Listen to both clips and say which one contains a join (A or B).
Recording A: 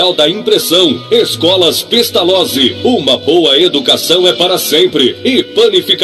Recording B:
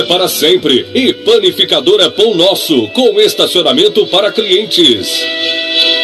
B